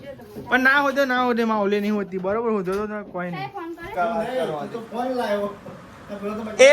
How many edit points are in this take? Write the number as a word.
one